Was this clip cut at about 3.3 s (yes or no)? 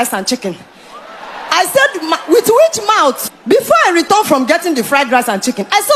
yes